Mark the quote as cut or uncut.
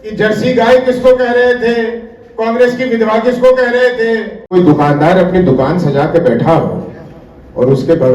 cut